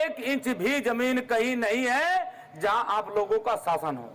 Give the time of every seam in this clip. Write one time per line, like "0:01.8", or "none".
none

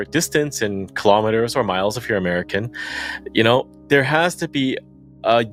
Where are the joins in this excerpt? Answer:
none

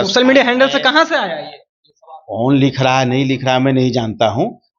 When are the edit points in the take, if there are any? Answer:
none

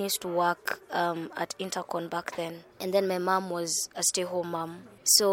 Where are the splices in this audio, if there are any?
none

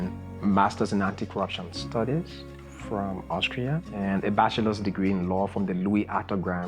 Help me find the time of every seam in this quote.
0:03.9

